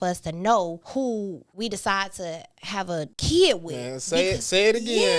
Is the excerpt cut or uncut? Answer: cut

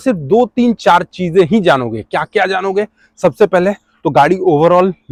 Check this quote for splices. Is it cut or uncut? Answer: uncut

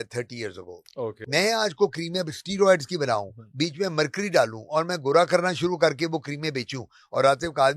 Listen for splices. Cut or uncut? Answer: cut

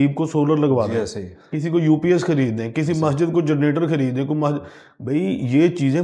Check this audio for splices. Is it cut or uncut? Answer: uncut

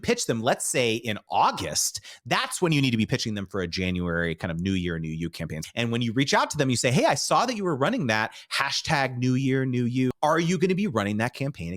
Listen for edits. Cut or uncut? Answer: cut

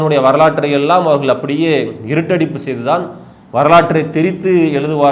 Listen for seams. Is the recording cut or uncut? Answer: uncut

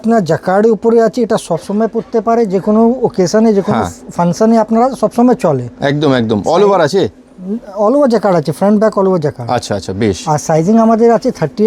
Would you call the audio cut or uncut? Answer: uncut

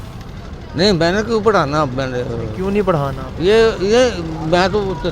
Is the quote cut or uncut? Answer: uncut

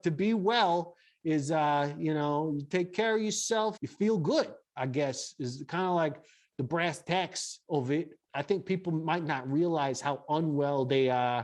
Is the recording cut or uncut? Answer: cut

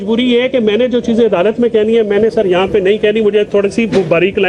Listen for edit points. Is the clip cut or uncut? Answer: uncut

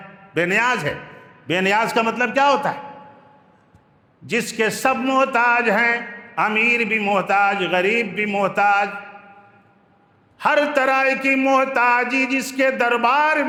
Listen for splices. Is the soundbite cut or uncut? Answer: uncut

